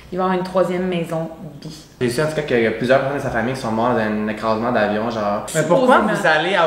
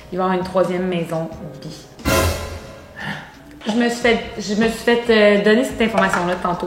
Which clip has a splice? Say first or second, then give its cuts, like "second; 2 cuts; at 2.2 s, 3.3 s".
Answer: first; 2 cuts; at 1.9 s, 5.5 s